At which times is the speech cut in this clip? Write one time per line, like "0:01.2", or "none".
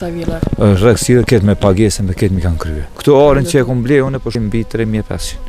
0:02.8
0:04.4

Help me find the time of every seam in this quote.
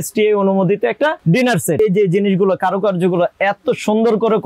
0:01.8

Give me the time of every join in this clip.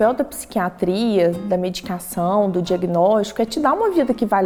none

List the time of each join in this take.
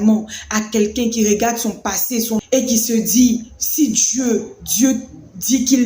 0:02.4

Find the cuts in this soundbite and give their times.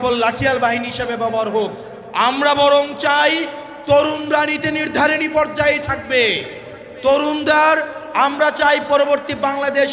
none

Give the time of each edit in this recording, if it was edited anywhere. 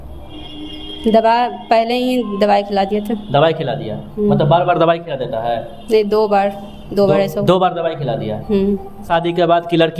0:09.1

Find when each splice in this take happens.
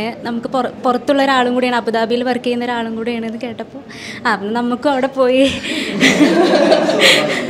none

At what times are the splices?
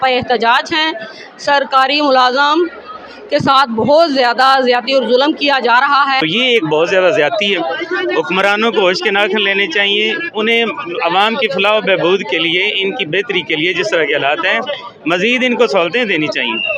0:06.2

